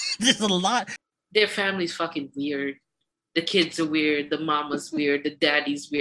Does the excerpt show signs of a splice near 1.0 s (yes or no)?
yes